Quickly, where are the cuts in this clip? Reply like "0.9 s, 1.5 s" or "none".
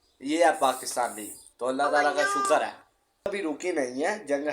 3.3 s